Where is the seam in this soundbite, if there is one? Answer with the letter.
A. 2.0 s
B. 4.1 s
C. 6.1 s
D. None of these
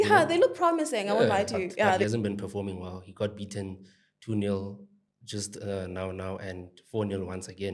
A